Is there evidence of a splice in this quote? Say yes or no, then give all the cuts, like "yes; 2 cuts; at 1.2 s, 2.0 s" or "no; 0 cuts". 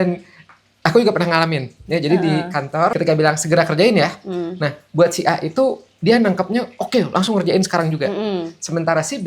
no; 0 cuts